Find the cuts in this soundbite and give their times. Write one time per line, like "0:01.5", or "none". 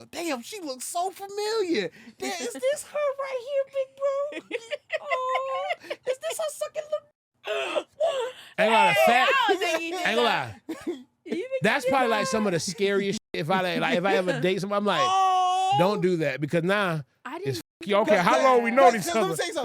none